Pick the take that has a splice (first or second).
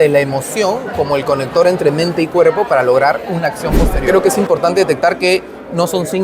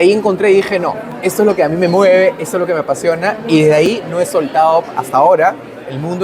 first